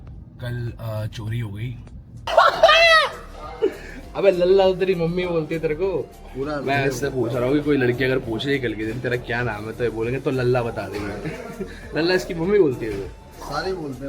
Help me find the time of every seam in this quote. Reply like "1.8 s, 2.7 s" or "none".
2.3 s